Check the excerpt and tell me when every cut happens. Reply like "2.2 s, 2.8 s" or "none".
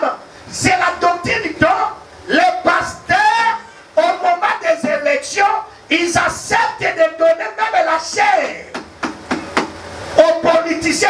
none